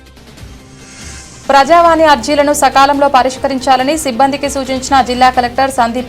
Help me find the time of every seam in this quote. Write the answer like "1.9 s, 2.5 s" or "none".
1.2 s